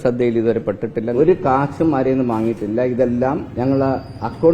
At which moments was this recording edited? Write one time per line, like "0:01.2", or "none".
0:01.1
0:03.5